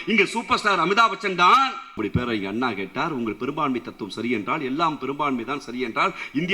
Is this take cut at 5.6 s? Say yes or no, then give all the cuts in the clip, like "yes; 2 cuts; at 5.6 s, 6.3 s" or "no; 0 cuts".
no; 1 cut; at 2.0 s